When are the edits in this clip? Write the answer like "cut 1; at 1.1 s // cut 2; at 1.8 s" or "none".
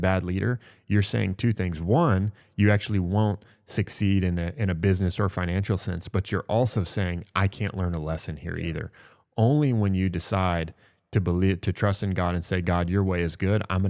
none